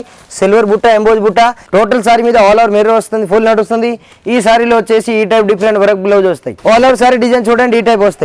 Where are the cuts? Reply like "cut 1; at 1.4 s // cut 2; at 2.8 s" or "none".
cut 1; at 1.6 s // cut 2; at 6.5 s